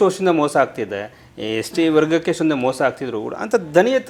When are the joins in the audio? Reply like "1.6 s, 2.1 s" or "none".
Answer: none